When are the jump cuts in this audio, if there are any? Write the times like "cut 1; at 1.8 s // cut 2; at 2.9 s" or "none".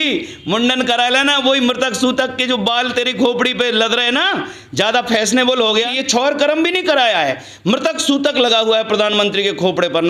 cut 1; at 5.9 s

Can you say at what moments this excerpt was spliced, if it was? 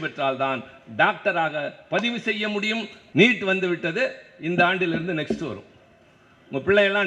cut 1; at 3.0 s

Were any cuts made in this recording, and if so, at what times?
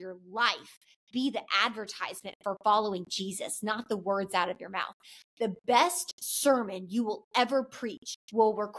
cut 1; at 5.2 s

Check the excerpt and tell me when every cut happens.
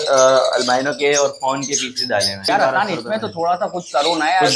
cut 1; at 2.4 s

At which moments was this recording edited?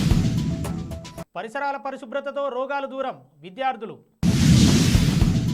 cut 1; at 1.2 s

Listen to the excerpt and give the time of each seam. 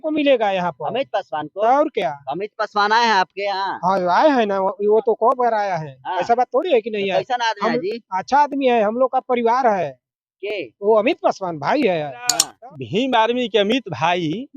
cut 1; at 12.5 s

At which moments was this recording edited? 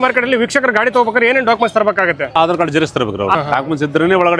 cut 1; at 2.2 s // cut 2; at 3.3 s

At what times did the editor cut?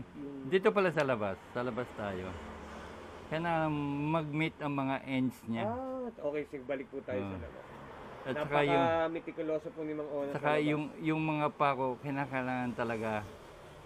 none

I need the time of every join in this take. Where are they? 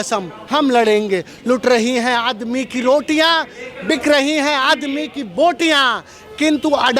none

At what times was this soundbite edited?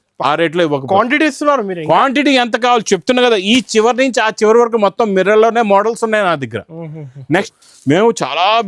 cut 1; at 7.5 s

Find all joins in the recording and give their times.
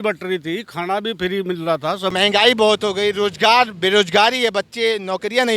cut 1; at 2.1 s

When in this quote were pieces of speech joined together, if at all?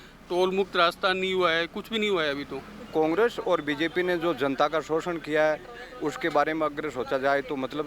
cut 1; at 2.9 s

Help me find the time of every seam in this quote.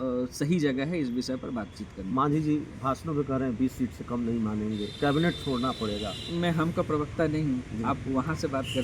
none

